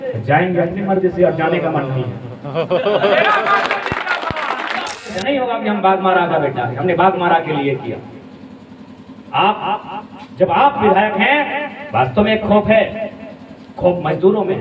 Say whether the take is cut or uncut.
cut